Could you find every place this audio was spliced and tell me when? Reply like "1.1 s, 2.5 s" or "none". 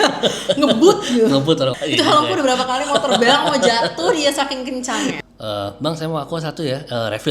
1.7 s, 5.2 s